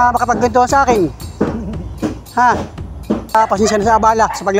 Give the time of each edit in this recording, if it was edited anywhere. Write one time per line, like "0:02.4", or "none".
0:03.3